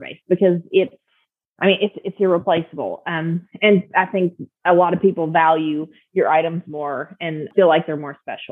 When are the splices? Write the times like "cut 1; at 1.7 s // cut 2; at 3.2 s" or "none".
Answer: cut 1; at 7.4 s